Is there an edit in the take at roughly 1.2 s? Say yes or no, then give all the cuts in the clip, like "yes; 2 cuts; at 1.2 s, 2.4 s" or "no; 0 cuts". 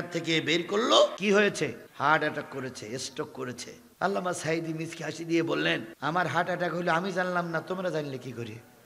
yes; 1 cut; at 1.2 s